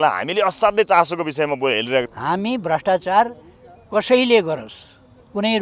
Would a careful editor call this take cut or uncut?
cut